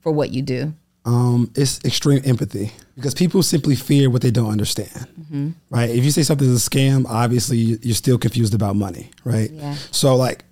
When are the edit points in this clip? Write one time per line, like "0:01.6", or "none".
0:03.1